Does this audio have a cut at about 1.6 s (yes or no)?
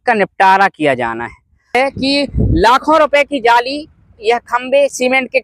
yes